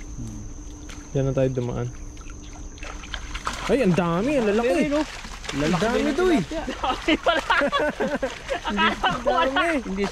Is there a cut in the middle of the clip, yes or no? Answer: no